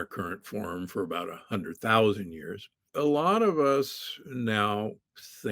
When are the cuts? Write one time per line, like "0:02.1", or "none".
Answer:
0:02.8